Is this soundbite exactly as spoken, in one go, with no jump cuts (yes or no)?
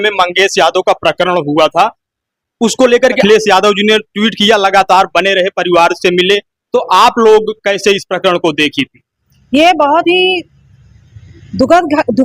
no